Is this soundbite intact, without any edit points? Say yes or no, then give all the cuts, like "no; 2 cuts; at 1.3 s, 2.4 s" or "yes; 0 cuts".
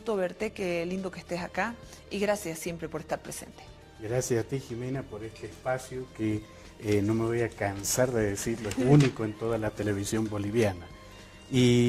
yes; 0 cuts